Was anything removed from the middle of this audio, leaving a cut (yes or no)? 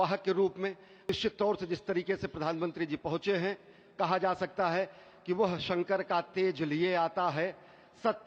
yes